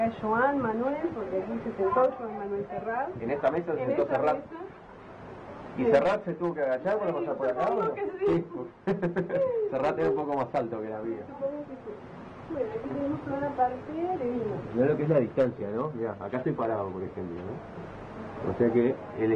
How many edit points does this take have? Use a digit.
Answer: 0